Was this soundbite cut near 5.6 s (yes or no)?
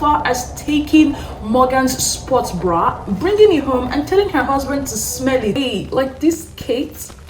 yes